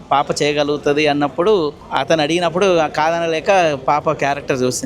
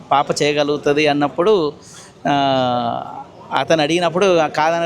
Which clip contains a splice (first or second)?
first